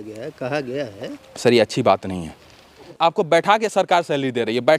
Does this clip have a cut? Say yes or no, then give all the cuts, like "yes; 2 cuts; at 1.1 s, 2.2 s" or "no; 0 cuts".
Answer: yes; 2 cuts; at 1.2 s, 2.9 s